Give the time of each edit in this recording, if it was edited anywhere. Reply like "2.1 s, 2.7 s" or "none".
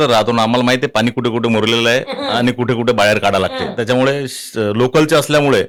none